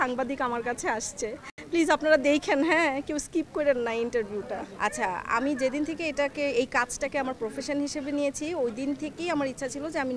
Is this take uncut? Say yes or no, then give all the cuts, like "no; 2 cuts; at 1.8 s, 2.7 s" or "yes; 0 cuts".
yes; 0 cuts